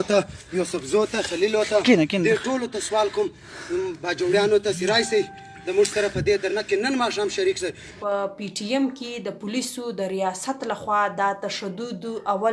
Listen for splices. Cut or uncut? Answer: cut